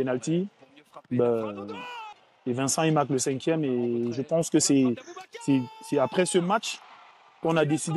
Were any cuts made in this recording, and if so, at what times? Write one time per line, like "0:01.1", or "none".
none